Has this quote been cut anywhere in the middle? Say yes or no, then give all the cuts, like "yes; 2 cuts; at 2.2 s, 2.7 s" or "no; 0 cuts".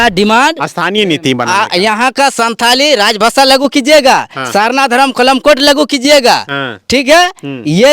no; 0 cuts